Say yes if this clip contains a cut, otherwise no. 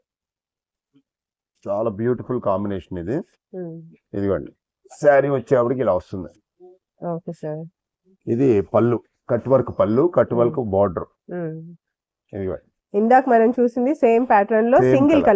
no